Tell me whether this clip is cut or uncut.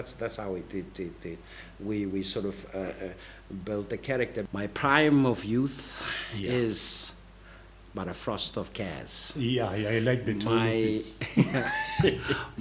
cut